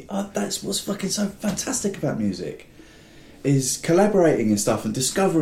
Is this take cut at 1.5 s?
no; 0 cuts

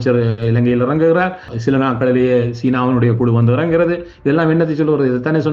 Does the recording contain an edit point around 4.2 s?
no; 1 cut; at 1.5 s

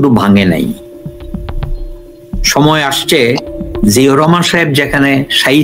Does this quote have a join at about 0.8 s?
yes; 2 cuts; at 0.8 s, 2.5 s

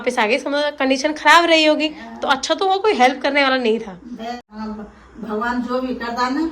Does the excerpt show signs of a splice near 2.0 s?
no; 1 cut; at 4.5 s

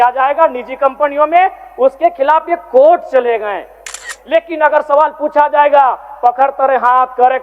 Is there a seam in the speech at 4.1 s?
yes; 1 cut; at 4.1 s

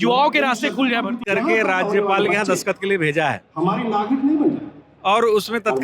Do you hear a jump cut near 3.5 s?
no; 1 cut; at 1.2 s

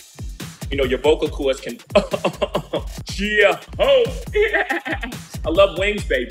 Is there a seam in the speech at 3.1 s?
yes; 1 cut; at 3.1 s

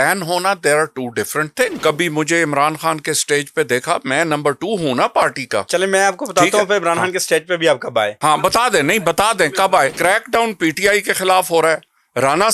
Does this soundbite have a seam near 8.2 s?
yes; 3 cuts; at 1.8 s, 8.2 s, 9.9 s

